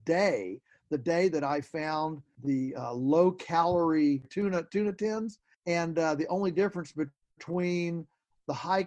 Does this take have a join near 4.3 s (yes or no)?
no